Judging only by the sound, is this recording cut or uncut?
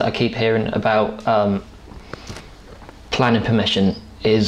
uncut